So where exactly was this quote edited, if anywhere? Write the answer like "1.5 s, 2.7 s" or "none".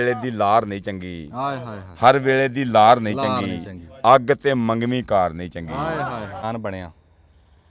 6.4 s